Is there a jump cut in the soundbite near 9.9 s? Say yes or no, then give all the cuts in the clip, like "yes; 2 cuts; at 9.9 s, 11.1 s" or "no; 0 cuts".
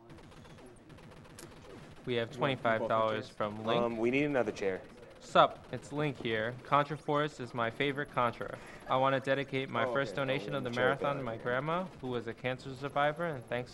no; 1 cut; at 4.6 s